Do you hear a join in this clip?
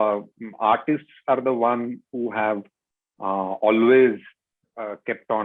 no; 0 cuts

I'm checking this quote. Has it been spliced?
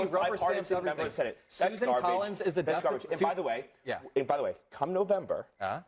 no; 0 cuts

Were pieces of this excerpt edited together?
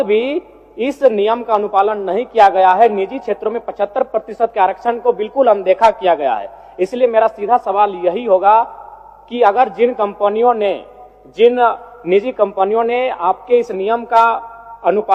no; 0 cuts

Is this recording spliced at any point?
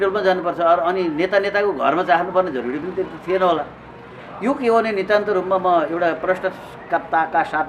no; 0 cuts

